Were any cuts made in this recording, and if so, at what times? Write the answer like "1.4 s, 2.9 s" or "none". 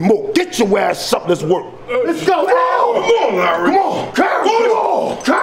1.8 s